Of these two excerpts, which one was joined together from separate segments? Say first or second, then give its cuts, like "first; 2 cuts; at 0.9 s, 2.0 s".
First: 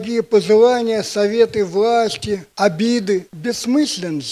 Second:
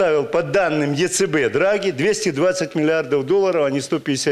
first; 2 cuts; at 2.5 s, 3.3 s